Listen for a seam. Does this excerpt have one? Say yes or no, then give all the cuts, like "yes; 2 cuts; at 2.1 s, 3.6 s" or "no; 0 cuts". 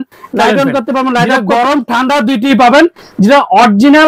yes; 1 cut; at 1.3 s